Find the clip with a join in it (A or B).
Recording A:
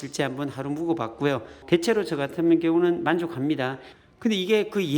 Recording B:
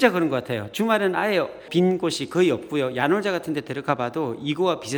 A